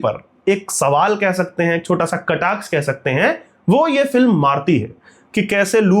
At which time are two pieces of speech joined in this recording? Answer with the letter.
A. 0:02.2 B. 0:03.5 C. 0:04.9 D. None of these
D